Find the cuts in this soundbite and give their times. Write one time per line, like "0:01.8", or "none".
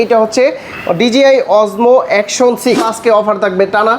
0:02.9